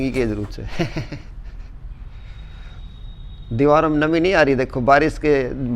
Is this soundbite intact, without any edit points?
yes; 0 cuts

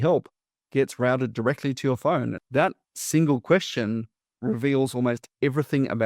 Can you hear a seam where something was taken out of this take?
yes; 1 cut; at 2.4 s

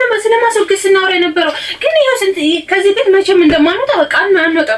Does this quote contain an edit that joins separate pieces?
no; 0 cuts

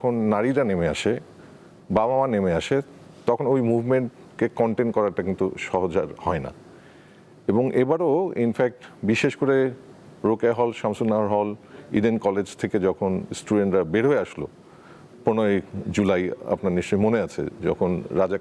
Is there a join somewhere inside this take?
no; 0 cuts

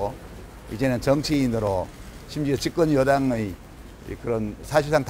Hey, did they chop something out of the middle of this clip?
no; 0 cuts

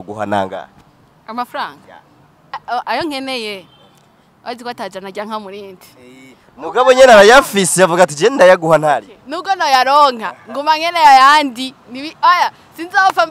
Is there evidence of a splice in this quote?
yes; 1 cut; at 2.5 s

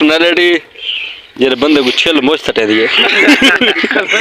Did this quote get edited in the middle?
no; 0 cuts

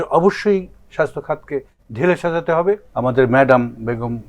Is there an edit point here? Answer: yes; 1 cut; at 2.9 s

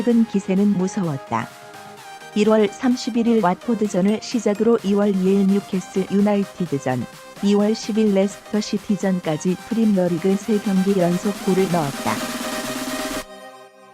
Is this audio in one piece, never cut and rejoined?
no; 1 cut; at 12.1 s

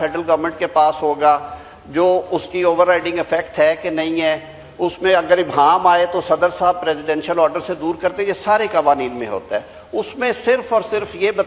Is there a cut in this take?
no; 0 cuts

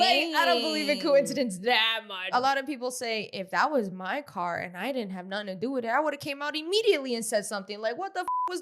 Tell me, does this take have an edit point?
yes; 1 cut; at 2.3 s

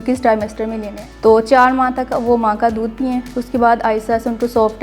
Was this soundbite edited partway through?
yes; 1 cut; at 1.1 s

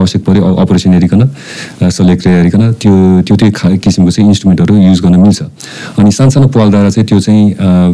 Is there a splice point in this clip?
no; 0 cuts

